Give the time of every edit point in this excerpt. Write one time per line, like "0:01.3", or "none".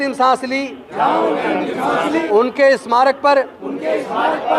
0:02.2